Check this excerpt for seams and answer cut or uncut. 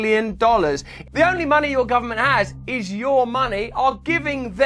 cut